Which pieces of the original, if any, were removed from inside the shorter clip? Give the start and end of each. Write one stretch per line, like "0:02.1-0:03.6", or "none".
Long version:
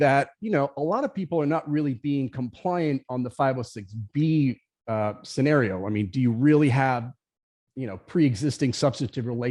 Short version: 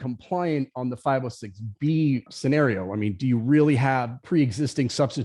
0:04.6-0:05.2
0:07.1-0:08.0